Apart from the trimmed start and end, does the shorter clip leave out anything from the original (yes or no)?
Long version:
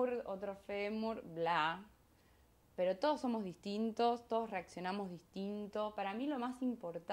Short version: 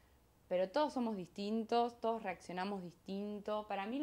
no